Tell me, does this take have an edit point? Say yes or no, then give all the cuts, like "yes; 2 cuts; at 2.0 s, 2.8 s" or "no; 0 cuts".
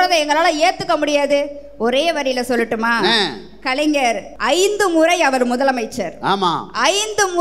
yes; 1 cut; at 4.3 s